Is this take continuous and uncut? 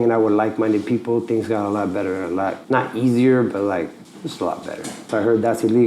no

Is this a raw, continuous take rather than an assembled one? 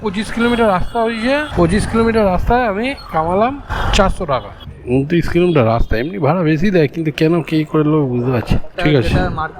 no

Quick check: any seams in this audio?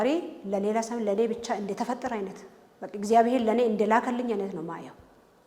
no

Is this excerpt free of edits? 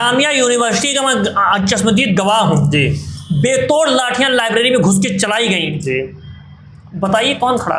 yes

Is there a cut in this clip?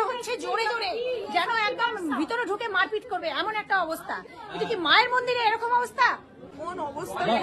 no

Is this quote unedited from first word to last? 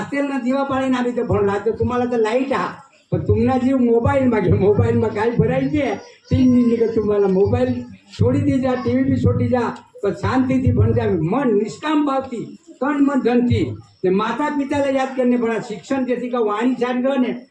yes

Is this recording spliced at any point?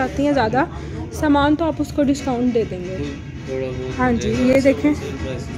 no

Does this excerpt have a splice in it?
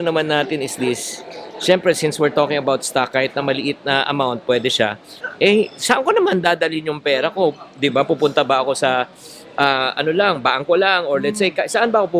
no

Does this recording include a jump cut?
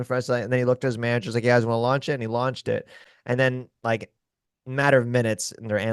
no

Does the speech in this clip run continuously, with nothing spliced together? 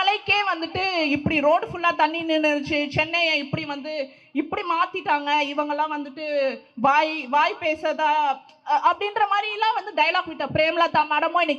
yes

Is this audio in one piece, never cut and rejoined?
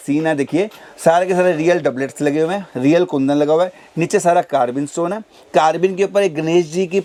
yes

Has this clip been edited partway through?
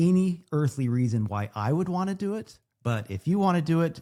no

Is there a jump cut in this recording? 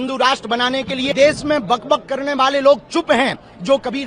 yes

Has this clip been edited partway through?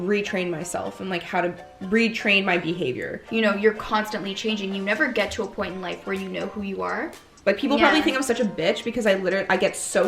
yes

